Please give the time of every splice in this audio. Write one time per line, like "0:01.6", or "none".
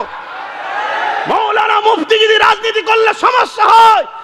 0:00.9